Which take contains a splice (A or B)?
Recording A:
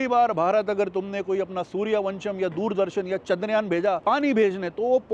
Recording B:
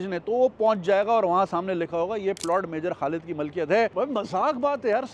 B